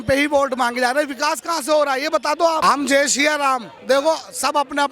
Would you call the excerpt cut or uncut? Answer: cut